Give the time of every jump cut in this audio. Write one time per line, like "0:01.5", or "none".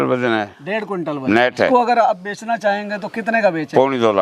0:01.7

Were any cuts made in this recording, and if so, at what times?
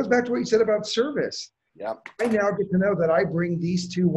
none

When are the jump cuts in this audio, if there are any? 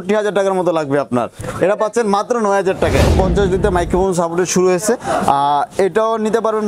0:03.1

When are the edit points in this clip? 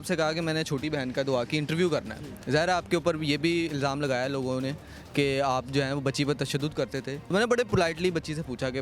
0:07.2

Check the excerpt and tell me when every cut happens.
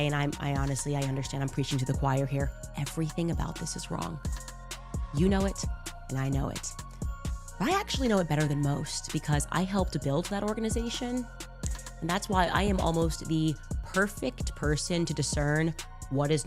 none

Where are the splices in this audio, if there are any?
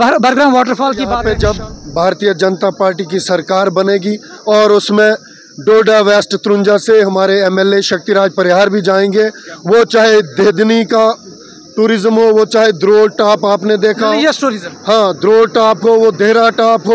0:01.2

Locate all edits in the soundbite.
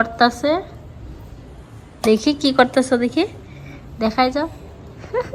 none

